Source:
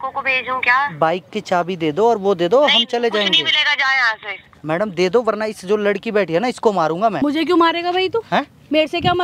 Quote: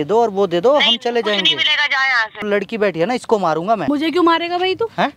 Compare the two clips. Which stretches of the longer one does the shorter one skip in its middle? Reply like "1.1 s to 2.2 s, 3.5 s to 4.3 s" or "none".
4.3 s to 5.8 s